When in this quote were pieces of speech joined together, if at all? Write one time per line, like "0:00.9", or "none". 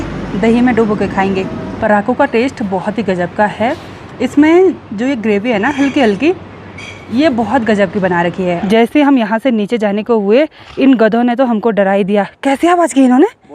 0:01.7
0:08.6